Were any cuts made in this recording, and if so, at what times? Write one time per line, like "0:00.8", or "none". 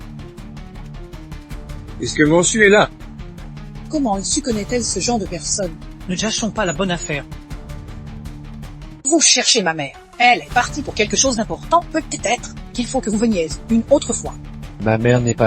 0:02.0
0:07.2
0:09.0

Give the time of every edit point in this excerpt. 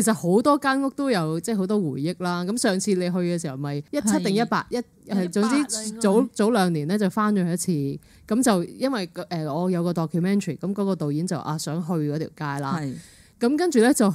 0:03.8

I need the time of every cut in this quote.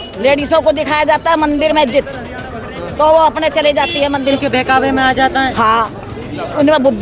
0:04.3

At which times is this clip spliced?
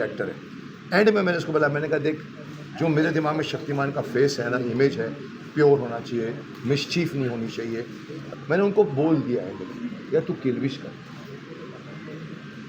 0:08.3

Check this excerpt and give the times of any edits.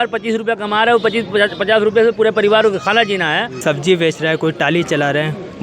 0:03.6

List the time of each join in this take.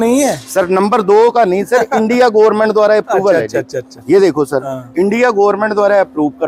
none

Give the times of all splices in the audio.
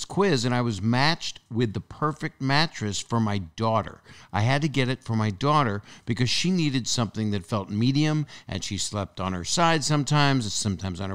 none

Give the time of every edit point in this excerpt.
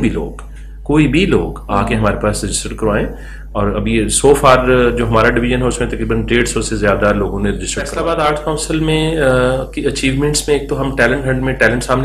0:08.0

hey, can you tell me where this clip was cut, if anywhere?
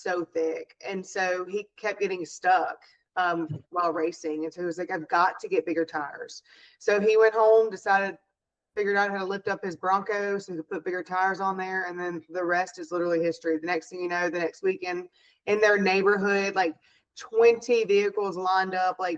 none

